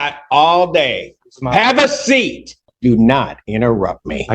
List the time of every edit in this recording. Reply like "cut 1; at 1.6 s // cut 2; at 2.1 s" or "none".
cut 1; at 2.6 s